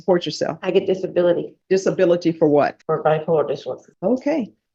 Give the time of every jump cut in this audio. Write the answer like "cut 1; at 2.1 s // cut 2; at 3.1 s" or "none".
cut 1; at 1.5 s // cut 2; at 2.8 s // cut 3; at 3.9 s